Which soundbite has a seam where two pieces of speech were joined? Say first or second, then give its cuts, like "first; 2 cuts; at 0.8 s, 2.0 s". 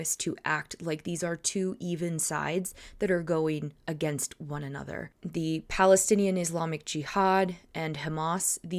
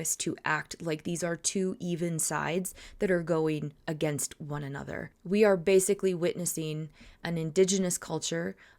second; 1 cut; at 5.1 s